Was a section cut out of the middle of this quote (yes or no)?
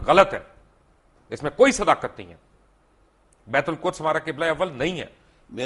no